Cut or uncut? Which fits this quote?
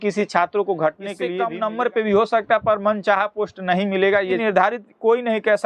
cut